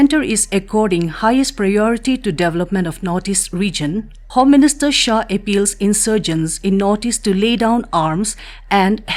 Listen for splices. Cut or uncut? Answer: cut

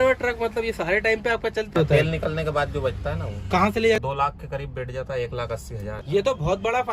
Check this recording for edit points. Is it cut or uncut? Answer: cut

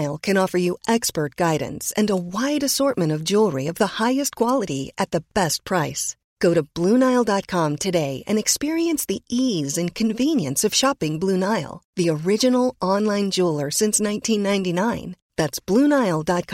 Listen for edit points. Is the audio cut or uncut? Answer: uncut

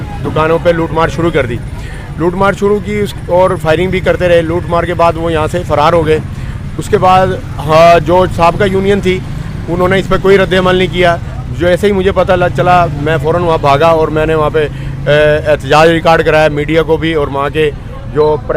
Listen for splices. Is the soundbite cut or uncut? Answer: uncut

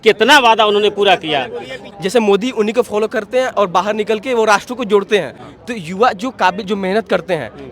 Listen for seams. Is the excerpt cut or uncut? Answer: cut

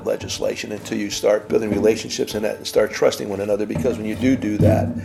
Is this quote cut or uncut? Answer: cut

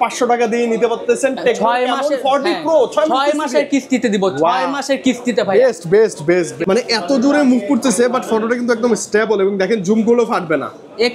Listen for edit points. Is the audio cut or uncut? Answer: cut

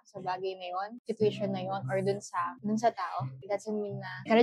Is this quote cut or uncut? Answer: cut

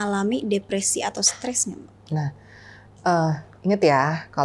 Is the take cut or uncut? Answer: uncut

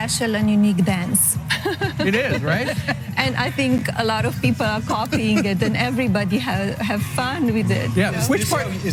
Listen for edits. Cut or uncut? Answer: uncut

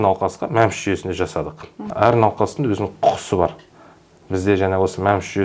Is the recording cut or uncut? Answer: cut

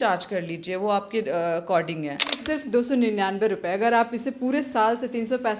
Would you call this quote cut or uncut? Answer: cut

